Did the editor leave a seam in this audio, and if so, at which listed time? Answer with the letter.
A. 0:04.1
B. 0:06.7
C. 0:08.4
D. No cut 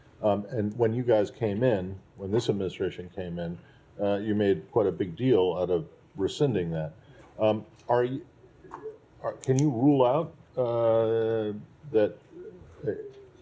D